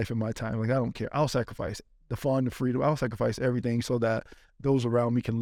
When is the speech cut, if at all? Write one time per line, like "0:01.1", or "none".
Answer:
none

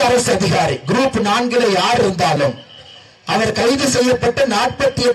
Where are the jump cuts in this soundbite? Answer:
none

